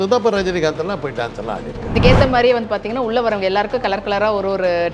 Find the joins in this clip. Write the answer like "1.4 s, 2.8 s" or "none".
1.9 s

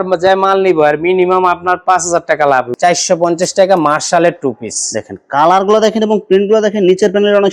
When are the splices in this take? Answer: 2.7 s

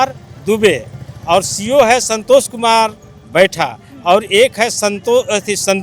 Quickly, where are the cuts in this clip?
none

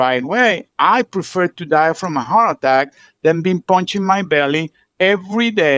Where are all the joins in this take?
none

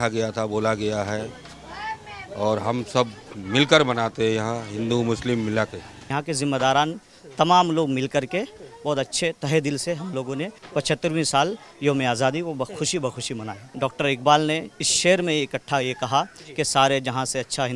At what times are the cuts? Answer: 6.1 s, 13.6 s

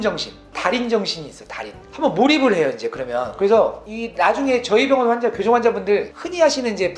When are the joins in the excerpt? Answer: none

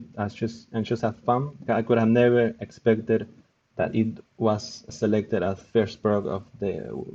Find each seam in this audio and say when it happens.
1.6 s, 4.8 s

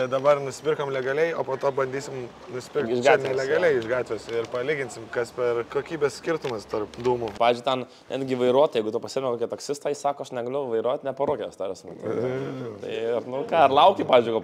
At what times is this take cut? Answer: 5.7 s, 7.3 s

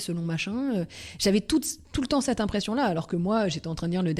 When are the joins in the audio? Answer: none

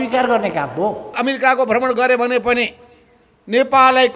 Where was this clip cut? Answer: 1.2 s

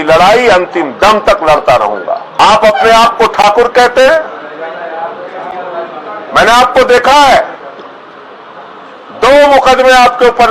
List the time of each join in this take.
2.3 s

